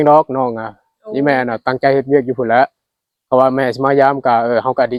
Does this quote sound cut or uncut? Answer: uncut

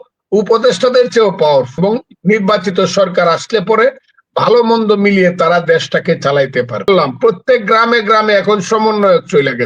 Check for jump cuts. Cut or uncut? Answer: cut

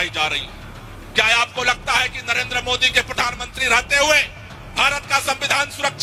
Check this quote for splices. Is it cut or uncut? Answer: uncut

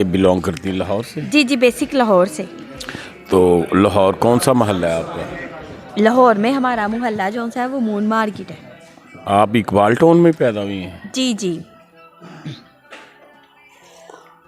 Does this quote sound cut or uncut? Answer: uncut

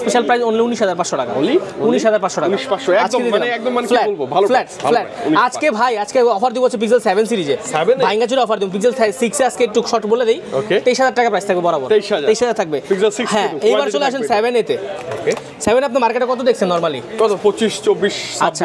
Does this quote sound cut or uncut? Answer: uncut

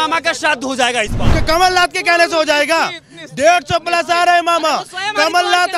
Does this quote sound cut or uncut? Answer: cut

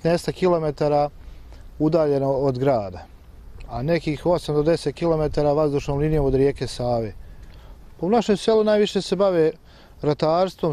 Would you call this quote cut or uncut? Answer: cut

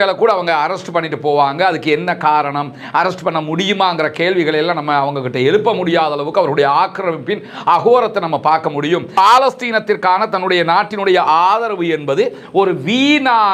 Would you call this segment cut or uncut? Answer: cut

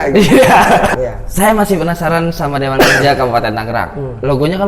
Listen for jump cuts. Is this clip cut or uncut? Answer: cut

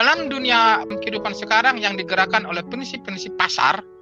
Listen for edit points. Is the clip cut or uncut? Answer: cut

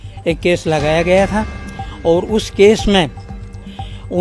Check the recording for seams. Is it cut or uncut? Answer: uncut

